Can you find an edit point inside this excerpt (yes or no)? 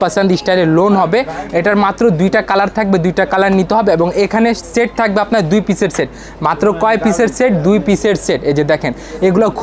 no